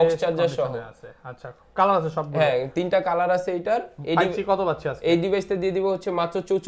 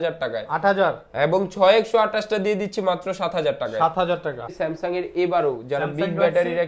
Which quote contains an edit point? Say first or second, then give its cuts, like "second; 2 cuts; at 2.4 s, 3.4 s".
second; 1 cut; at 4.5 s